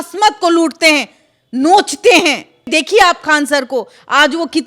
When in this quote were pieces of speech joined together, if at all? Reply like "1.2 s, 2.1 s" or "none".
2.7 s